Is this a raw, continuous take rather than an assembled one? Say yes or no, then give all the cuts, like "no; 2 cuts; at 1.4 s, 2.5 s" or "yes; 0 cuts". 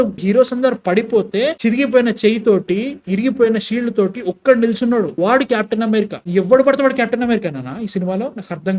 yes; 0 cuts